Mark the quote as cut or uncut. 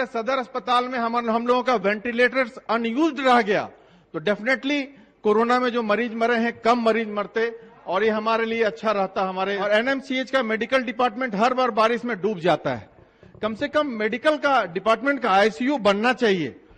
cut